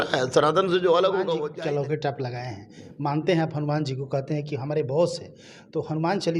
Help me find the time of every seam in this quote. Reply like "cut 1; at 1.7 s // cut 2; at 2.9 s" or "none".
cut 1; at 1.3 s